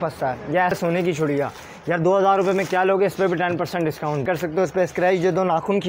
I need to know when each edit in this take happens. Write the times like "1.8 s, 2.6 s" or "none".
0.8 s, 4.2 s